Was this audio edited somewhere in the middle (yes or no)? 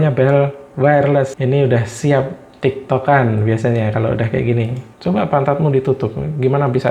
yes